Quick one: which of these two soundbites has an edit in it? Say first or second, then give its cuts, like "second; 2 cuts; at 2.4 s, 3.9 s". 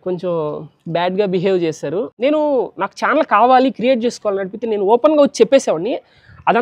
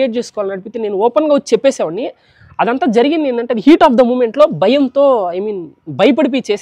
first; 1 cut; at 2.1 s